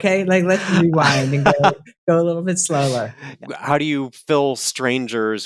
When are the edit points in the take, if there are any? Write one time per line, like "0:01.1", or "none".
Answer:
0:03.3